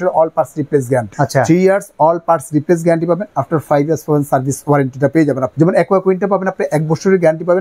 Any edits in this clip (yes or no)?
yes